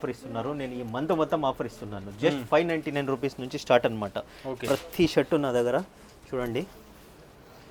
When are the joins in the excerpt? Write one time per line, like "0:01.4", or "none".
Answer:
none